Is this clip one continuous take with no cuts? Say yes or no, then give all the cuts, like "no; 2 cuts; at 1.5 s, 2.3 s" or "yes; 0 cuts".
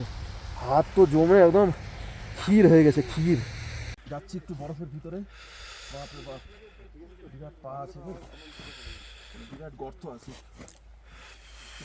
no; 1 cut; at 4.0 s